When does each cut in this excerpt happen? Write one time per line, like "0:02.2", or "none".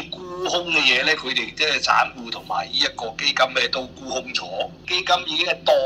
0:04.8